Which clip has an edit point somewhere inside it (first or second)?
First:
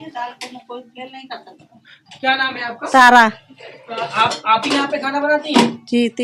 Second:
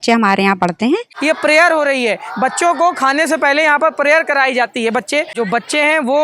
second